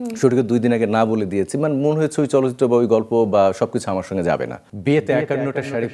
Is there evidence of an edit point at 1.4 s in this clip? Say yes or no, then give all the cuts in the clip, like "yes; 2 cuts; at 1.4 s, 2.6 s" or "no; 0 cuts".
no; 1 cut; at 4.7 s